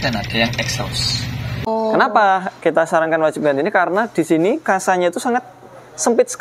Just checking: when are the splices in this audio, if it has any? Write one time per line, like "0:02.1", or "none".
0:01.7